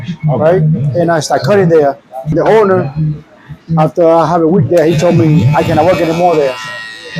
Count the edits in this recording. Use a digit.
1